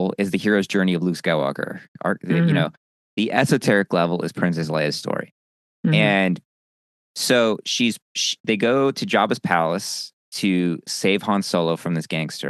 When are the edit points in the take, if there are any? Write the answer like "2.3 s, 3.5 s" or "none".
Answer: none